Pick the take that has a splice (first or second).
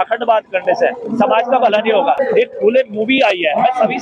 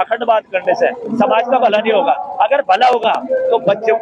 first